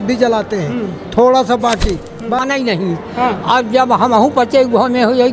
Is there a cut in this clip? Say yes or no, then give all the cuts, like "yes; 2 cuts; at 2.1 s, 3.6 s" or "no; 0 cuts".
yes; 1 cut; at 2.4 s